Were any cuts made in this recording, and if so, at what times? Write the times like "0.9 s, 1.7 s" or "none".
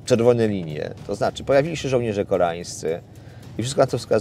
none